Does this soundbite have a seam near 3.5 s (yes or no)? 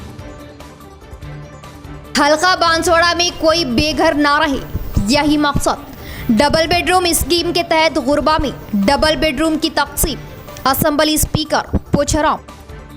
no